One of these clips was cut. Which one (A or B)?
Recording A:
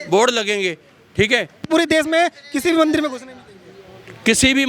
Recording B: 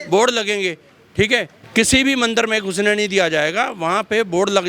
B